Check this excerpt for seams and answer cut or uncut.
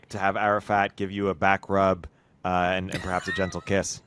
uncut